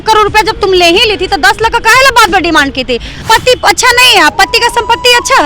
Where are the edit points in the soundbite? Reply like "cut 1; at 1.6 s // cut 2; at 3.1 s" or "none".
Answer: cut 1; at 3.1 s